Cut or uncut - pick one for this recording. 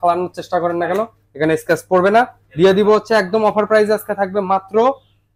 uncut